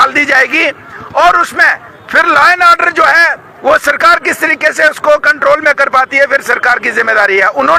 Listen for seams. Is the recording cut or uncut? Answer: uncut